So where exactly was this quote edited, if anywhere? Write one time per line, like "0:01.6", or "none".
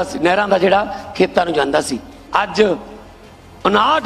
0:02.2